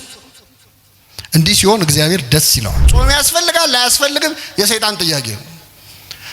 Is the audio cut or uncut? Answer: cut